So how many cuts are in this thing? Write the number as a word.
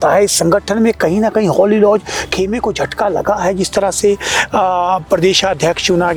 zero